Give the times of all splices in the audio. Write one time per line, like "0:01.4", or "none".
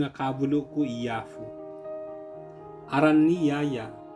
0:01.3
0:02.6